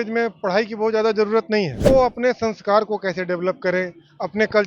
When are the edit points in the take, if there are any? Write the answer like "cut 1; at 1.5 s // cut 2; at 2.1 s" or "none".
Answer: cut 1; at 1.8 s